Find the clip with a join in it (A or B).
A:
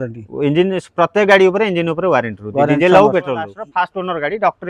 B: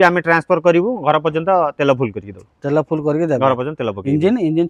A